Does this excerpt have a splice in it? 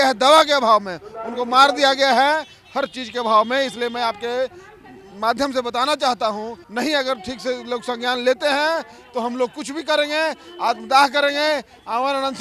yes; 1 cut; at 6.6 s

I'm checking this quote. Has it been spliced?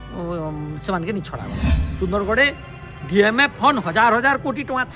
yes; 1 cut; at 1.8 s

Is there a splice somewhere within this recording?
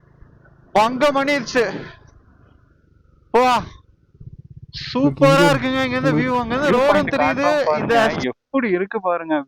yes; 1 cut; at 8.2 s

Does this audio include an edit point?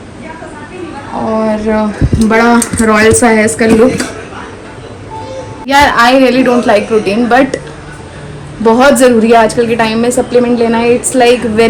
no; 0 cuts

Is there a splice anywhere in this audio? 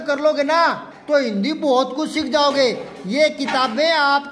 no; 0 cuts

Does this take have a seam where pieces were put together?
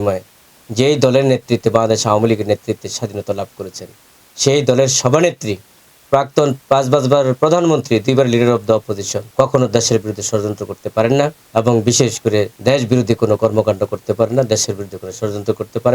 yes; 3 cuts; at 9.2 s, 11.4 s, 12.5 s

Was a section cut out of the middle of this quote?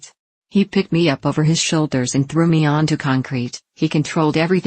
yes; 1 cut; at 3.6 s

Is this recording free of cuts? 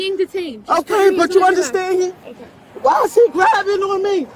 yes; 0 cuts

